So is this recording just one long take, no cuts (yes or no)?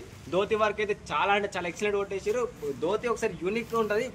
yes